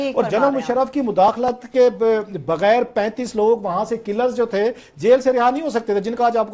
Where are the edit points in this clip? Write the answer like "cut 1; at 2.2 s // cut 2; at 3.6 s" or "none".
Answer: none

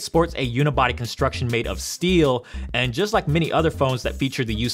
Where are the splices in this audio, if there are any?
cut 1; at 2.5 s

